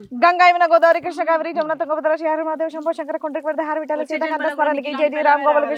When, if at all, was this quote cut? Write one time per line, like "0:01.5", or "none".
none